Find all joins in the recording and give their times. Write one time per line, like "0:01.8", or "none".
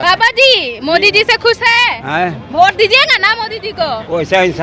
none